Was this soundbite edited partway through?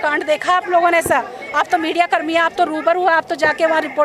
no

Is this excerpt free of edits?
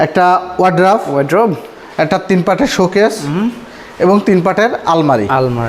yes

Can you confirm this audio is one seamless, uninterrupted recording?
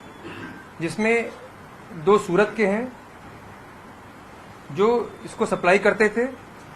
yes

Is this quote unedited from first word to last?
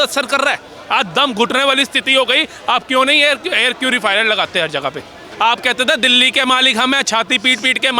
no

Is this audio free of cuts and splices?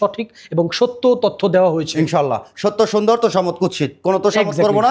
yes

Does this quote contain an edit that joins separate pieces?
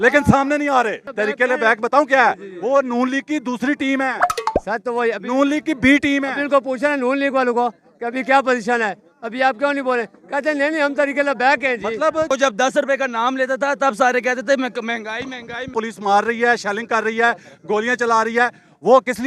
yes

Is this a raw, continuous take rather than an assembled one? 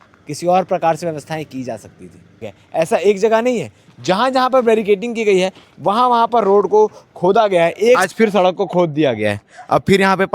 no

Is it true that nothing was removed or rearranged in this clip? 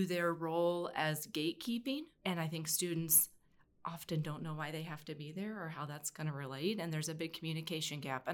yes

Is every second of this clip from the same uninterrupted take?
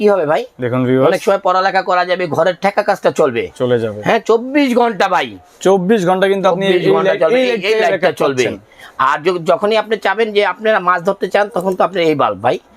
yes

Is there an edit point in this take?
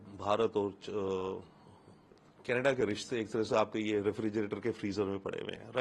no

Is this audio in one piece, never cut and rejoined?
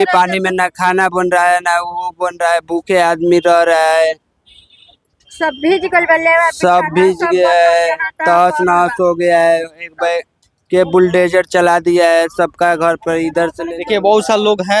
yes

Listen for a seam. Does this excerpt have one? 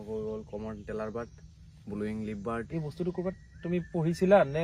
yes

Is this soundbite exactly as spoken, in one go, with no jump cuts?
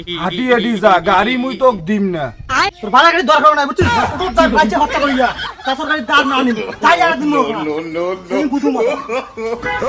yes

